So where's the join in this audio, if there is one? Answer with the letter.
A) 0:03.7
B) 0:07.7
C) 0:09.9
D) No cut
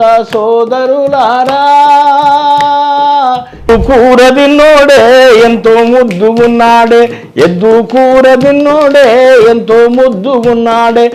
A